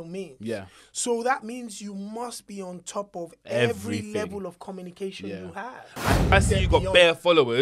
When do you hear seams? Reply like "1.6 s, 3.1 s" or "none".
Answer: 6.3 s